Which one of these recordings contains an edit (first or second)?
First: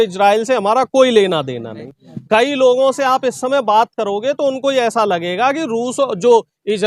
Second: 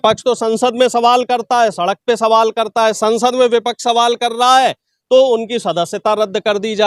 first